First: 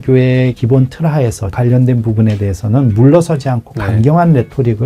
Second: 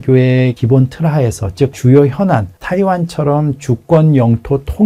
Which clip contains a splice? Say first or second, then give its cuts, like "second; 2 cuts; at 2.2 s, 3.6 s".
first; 1 cut; at 1.6 s